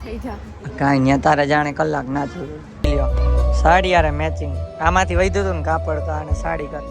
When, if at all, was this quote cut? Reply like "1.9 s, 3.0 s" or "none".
2.6 s